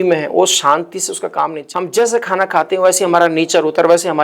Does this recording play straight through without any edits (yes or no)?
no